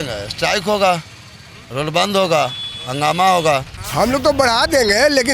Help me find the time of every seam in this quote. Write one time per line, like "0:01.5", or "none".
0:03.8